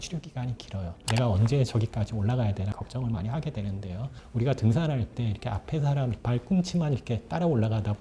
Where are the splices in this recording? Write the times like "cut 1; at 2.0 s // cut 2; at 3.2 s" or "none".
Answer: cut 1; at 1.0 s